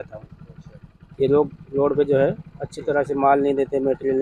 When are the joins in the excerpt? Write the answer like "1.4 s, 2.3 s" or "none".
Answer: none